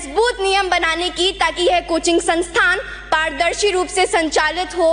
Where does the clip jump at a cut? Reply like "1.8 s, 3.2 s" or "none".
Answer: none